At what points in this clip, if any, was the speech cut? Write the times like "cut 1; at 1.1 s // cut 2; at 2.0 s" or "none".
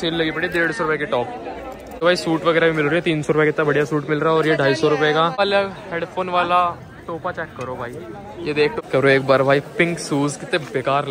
cut 1; at 1.8 s // cut 2; at 5.3 s // cut 3; at 8.7 s

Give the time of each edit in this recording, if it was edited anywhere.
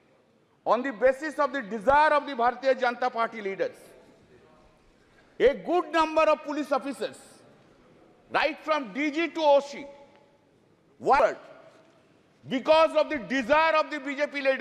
cut 1; at 11.2 s

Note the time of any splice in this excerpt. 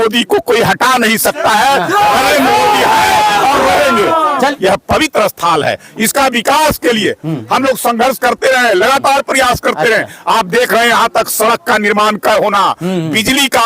cut 1; at 4.5 s

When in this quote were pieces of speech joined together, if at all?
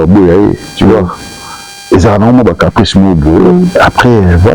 none

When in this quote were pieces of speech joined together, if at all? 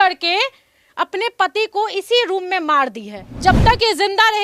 cut 1; at 3.4 s

